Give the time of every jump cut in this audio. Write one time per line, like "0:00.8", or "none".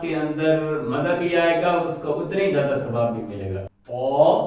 0:03.6